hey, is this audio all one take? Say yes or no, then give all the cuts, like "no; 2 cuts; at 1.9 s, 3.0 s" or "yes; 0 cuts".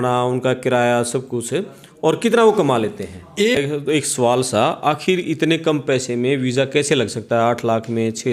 no; 1 cut; at 3.6 s